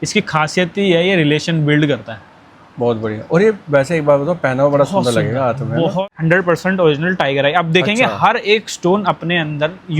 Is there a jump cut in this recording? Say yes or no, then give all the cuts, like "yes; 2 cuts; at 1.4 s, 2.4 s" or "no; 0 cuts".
yes; 1 cut; at 6.0 s